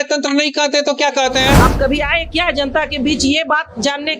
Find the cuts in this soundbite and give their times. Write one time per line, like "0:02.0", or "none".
0:01.6